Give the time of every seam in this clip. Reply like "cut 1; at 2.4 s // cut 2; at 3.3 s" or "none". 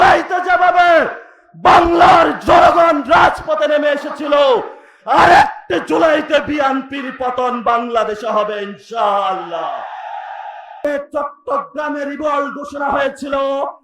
cut 1; at 10.8 s